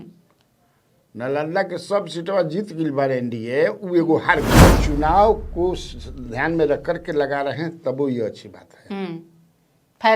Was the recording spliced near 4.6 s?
yes; 1 cut; at 4.6 s

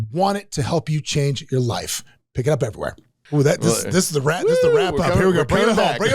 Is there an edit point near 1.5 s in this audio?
no; 1 cut; at 3.2 s

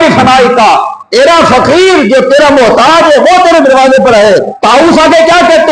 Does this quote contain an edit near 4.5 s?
yes; 1 cut; at 4.5 s

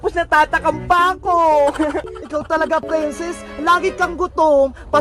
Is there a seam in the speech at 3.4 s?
no; 1 cut; at 2.2 s

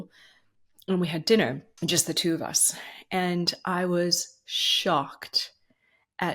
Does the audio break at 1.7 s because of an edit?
yes; 1 cut; at 1.7 s

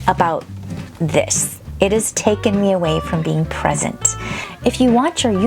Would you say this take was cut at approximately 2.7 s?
no; 1 cut; at 4.4 s

